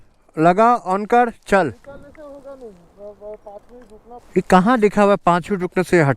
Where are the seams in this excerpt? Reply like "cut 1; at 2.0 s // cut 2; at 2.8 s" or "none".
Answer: cut 1; at 4.2 s